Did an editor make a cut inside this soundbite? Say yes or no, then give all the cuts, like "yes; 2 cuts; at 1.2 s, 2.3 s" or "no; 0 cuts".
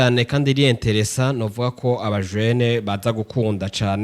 no; 0 cuts